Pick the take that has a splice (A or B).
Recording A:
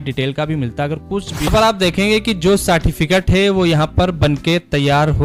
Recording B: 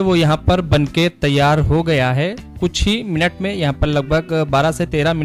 A